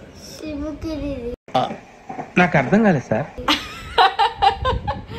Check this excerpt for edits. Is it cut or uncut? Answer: uncut